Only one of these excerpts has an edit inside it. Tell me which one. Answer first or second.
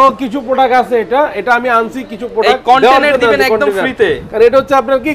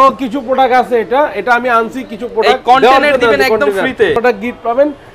second